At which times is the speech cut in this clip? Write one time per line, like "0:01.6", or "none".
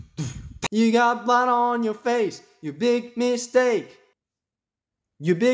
none